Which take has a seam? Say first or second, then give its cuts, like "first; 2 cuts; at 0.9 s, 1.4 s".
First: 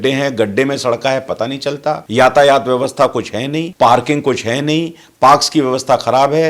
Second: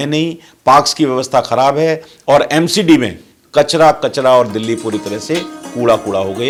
first; 2 cuts; at 2.0 s, 3.6 s